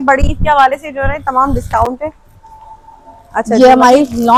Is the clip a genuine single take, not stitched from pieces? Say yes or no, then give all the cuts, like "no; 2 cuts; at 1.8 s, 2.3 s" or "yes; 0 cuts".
yes; 0 cuts